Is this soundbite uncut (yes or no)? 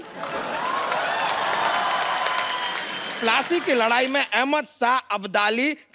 no